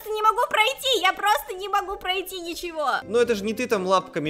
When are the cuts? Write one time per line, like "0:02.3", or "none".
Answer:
0:03.1